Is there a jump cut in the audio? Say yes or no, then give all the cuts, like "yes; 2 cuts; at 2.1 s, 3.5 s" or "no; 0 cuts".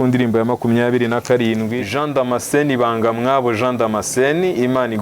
yes; 1 cut; at 1.9 s